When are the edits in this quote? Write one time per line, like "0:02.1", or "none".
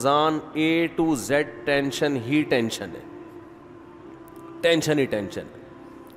none